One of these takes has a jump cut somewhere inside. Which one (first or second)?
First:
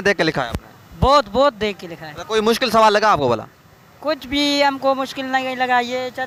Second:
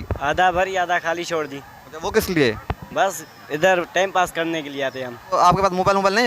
second